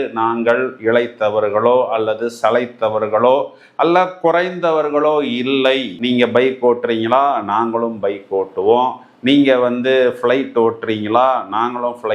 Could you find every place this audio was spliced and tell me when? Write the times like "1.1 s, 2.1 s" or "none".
none